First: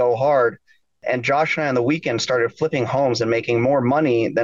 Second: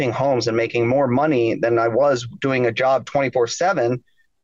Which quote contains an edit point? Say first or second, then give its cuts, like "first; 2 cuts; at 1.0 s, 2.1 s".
first; 1 cut; at 1.0 s